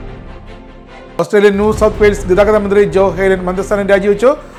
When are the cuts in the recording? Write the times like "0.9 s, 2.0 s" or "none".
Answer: none